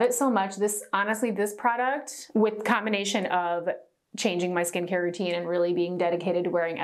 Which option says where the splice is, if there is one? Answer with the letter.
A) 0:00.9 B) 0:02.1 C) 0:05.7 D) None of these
B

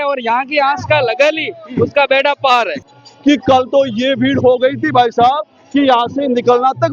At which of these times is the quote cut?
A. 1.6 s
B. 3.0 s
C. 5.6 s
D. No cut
B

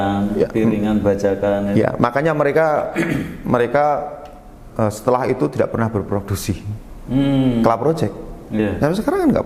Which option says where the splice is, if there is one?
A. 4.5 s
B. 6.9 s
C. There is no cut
C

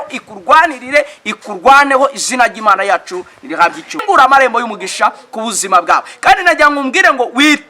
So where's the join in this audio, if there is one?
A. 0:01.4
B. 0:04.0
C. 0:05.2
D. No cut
B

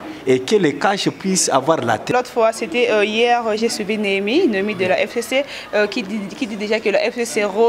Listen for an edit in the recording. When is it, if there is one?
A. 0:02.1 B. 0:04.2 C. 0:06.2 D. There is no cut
A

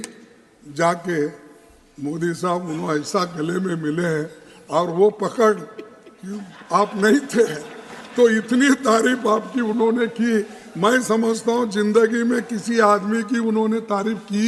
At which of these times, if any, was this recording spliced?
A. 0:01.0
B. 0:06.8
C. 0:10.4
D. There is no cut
D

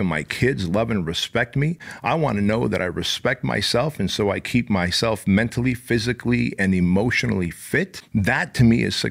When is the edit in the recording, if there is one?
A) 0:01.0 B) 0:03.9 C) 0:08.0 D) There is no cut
C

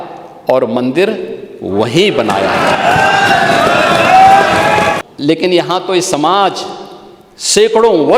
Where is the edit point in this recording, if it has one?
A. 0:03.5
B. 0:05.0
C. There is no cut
B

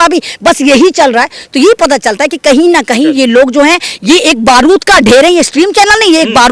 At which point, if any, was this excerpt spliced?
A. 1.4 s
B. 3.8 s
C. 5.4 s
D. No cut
D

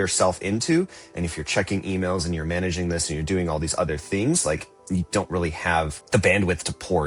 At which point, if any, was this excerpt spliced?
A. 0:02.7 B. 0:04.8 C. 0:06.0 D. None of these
C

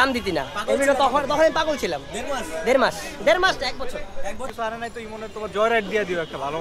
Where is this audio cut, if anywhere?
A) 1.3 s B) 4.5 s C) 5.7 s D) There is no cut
B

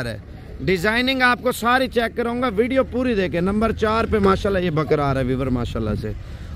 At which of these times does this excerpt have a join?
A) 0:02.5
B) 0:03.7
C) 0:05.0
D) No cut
D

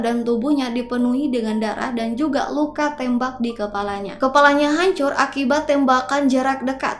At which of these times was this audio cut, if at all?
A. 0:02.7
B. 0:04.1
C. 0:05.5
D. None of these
B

